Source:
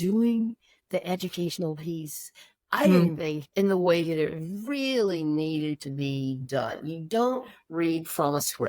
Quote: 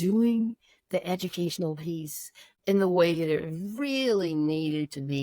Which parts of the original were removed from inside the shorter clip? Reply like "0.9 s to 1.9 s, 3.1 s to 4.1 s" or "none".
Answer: 2.5 s to 3.4 s

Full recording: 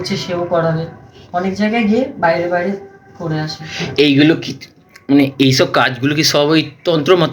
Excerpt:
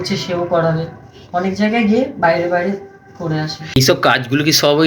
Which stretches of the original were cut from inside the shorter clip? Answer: 3.8 s to 5.5 s

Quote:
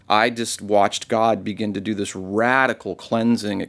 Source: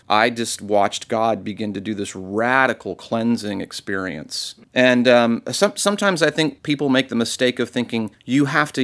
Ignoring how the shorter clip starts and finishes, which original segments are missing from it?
none

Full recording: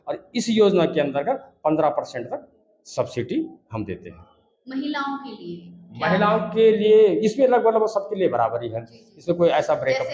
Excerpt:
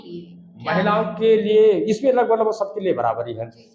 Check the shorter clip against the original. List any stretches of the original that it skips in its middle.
none

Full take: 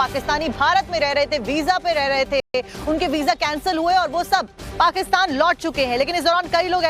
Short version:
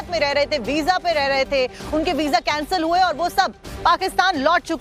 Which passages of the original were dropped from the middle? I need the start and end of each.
2.4 s to 2.5 s

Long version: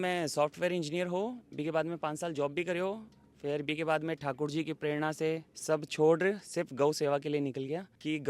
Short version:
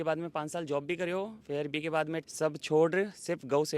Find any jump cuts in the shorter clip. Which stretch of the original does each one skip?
3.1 s to 3.3 s, 4.2 s to 5.5 s

